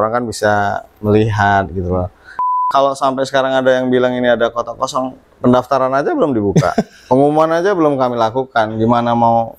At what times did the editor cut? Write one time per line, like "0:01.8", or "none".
0:02.5